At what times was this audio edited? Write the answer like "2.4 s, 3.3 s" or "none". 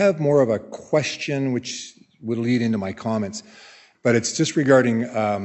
3.8 s